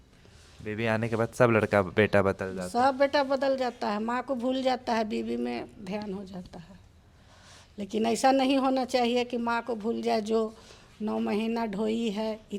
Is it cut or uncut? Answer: uncut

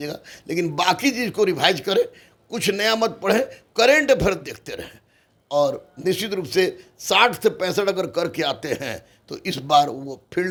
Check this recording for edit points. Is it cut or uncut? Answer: uncut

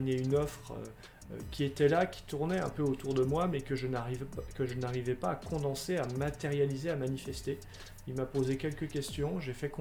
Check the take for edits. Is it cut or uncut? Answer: uncut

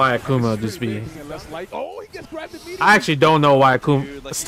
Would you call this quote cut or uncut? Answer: cut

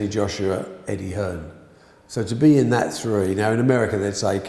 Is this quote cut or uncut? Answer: uncut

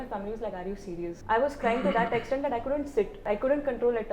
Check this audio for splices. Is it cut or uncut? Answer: cut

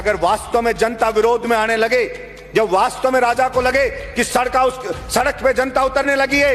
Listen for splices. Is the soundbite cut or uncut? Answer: uncut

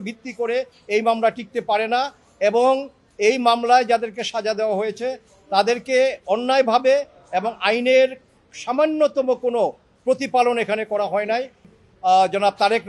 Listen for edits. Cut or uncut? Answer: cut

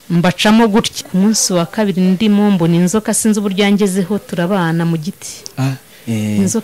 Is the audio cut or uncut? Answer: cut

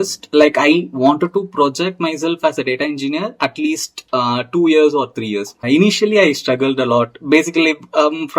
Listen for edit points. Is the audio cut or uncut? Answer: cut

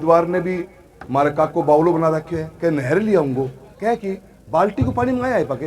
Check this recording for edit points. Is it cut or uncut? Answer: uncut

